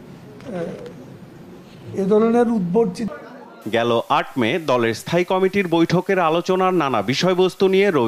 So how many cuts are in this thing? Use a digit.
1